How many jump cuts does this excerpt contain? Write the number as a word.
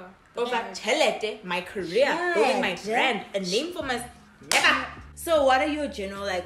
zero